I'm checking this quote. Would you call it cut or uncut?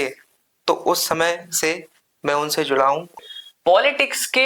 cut